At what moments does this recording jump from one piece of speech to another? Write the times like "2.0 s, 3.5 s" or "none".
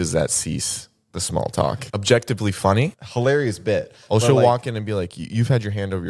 1.9 s, 3.0 s

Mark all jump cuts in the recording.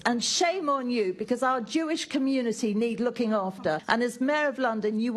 3.8 s

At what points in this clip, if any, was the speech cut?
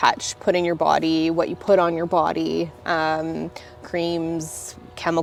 none

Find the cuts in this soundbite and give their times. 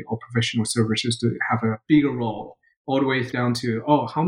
1.8 s, 3.3 s

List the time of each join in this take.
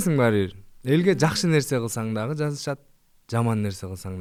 none

